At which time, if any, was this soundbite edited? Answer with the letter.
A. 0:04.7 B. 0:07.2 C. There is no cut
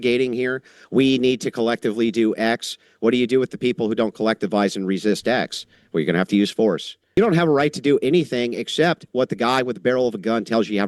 B